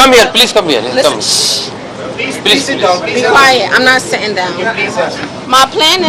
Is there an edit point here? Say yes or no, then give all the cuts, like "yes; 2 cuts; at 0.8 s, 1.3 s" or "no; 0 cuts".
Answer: no; 0 cuts